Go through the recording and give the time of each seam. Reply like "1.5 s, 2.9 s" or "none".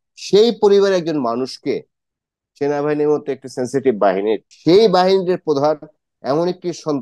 4.5 s